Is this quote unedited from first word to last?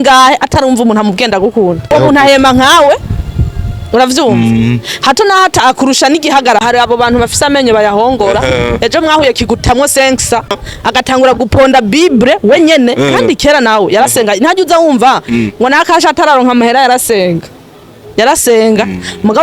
no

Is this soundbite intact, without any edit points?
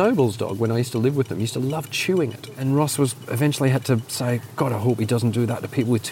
no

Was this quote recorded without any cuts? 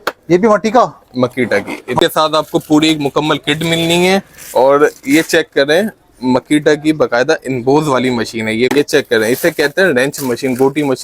no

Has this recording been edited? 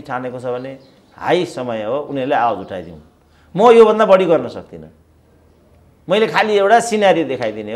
no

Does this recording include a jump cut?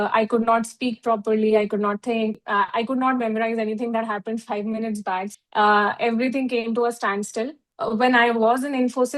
yes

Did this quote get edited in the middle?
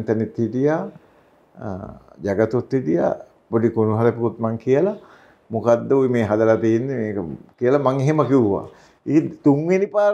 no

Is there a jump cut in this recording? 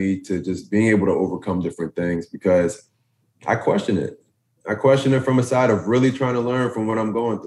no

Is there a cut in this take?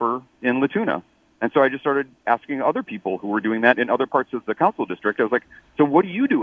no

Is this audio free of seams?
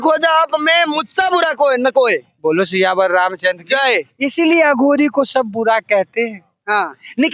yes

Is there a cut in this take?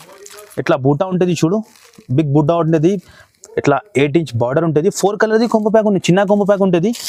no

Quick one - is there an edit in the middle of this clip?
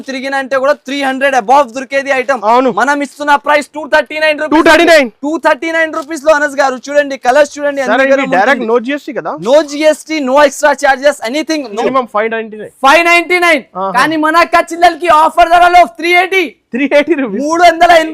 yes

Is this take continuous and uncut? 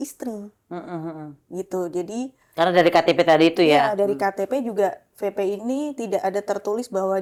yes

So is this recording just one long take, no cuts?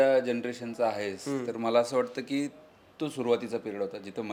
yes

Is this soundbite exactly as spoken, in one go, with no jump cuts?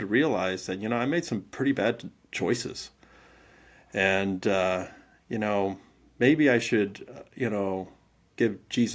yes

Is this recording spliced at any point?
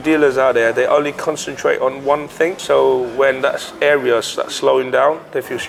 no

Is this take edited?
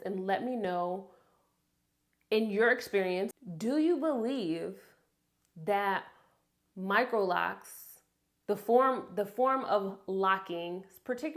yes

